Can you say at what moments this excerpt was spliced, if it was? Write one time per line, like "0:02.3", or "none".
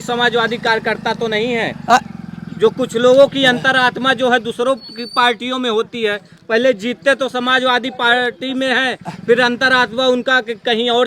none